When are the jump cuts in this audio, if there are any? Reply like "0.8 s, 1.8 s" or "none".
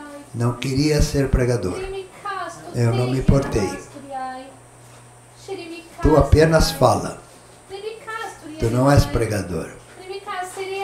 none